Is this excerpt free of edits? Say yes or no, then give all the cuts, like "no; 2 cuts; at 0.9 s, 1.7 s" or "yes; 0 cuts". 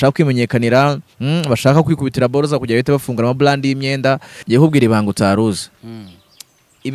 no; 1 cut; at 4.3 s